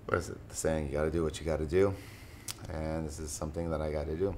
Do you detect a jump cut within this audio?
no; 0 cuts

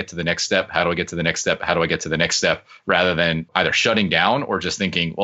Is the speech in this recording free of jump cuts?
yes; 0 cuts

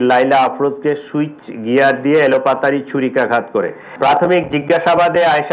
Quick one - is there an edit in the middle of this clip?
yes; 1 cut; at 3.8 s

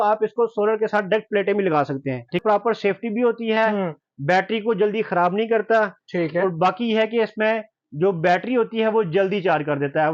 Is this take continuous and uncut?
no; 1 cut; at 2.4 s

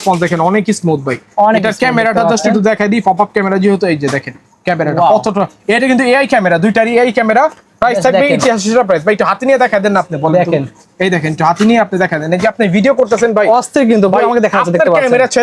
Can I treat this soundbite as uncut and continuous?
yes; 0 cuts

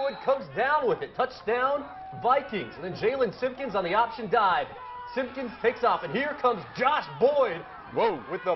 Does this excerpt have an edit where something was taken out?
no; 0 cuts

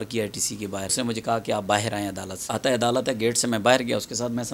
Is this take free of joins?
no; 2 cuts; at 0.9 s, 2.4 s

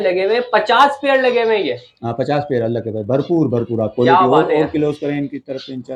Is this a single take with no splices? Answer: yes; 0 cuts

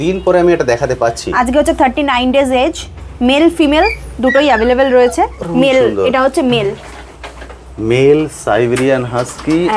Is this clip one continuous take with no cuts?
no; 1 cut; at 5.4 s

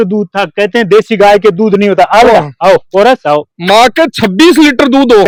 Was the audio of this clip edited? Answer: no; 0 cuts

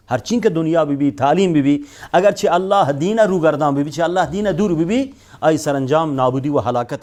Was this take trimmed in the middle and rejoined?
no; 0 cuts

